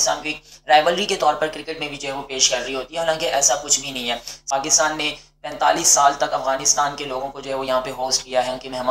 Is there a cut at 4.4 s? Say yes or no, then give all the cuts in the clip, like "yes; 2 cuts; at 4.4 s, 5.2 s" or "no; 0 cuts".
yes; 1 cut; at 4.4 s